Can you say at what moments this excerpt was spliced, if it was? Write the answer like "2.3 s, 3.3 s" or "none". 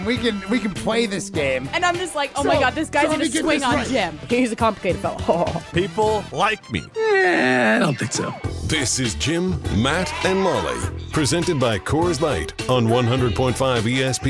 none